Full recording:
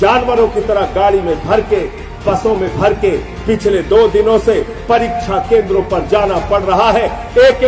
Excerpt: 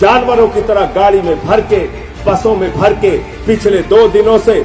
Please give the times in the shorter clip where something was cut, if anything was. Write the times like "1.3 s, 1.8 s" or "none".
none